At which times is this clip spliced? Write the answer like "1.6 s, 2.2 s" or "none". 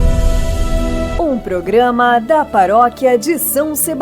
1.1 s